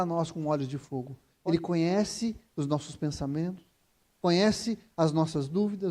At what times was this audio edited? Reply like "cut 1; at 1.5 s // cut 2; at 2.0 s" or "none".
cut 1; at 1.3 s

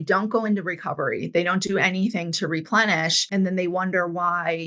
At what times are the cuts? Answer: cut 1; at 3.2 s

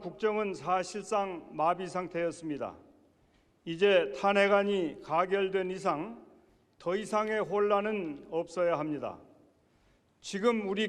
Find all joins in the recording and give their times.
cut 1; at 2.1 s

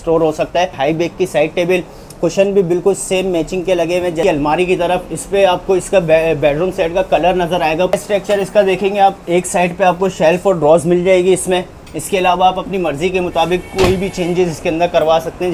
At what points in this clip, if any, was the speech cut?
cut 1; at 0.8 s // cut 2; at 4.2 s // cut 3; at 8.0 s

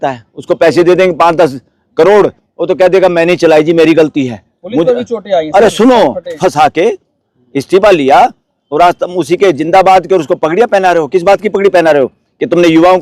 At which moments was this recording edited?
cut 1; at 6.3 s

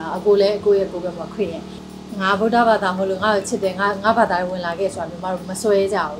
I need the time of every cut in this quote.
cut 1; at 1.7 s

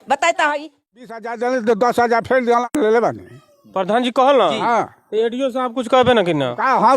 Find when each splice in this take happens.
cut 1; at 0.9 s // cut 2; at 2.7 s

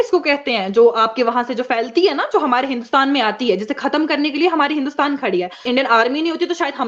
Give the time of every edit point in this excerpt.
cut 1; at 5.7 s

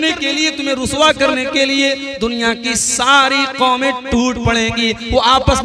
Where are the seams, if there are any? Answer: none

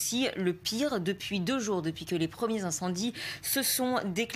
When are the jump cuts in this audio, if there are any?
none

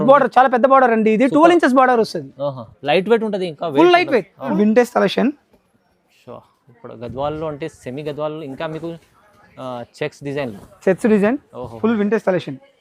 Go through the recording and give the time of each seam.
cut 1; at 4.5 s

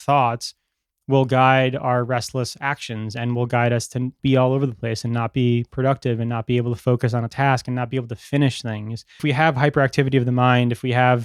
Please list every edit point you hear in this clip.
cut 1; at 4.1 s // cut 2; at 9.2 s

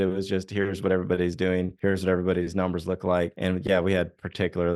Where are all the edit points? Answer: cut 1; at 1.7 s // cut 2; at 3.3 s

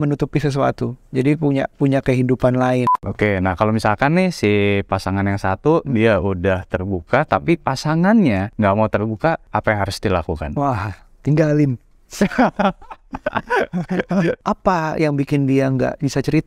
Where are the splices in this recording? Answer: cut 1; at 3.0 s // cut 2; at 8.5 s // cut 3; at 9.4 s // cut 4; at 14.4 s

